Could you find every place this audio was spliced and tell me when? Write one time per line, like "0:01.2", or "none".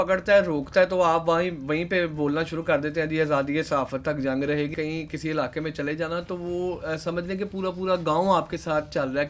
0:04.7